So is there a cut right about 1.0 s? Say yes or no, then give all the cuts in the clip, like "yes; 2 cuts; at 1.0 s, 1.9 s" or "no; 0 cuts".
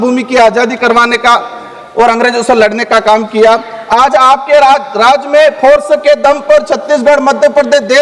no; 0 cuts